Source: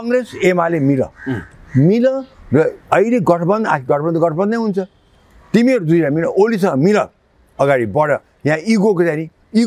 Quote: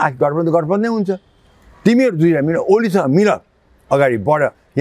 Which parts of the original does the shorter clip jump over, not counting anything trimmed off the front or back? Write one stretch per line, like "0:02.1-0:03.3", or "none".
none

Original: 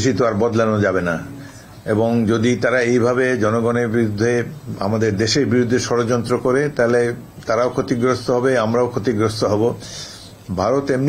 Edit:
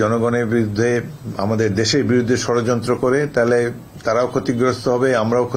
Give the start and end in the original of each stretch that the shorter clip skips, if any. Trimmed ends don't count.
none

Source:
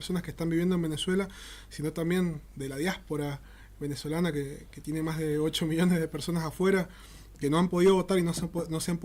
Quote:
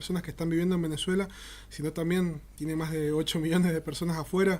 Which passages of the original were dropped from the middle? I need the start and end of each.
0:02.4-0:04.7

